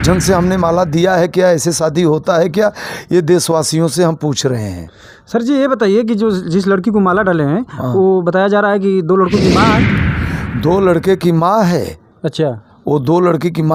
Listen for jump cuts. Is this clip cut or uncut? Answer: uncut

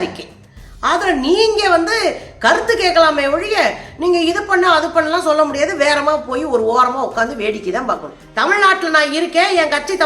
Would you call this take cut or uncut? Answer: cut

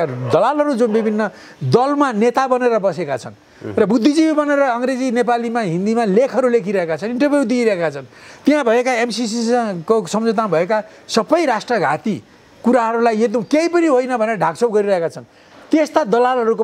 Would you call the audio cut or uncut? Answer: uncut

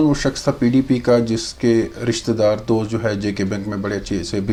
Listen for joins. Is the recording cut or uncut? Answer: uncut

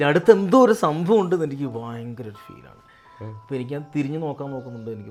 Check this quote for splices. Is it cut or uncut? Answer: uncut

